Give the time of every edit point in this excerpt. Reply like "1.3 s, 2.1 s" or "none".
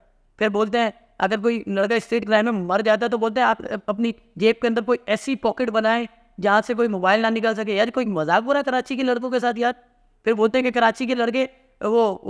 none